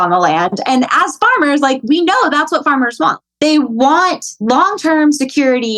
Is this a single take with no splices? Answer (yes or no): no